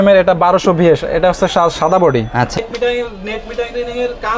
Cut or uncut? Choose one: cut